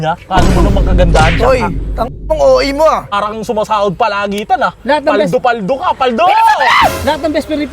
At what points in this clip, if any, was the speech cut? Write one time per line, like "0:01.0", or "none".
0:03.1